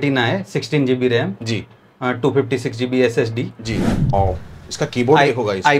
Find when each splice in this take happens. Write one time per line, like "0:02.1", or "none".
0:04.1